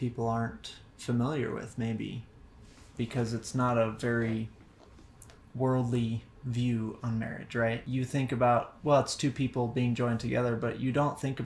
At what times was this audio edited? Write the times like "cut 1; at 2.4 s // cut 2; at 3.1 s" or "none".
cut 1; at 2.3 s // cut 2; at 7.8 s